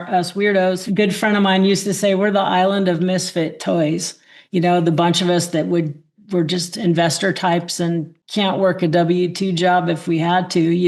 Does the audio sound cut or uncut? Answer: cut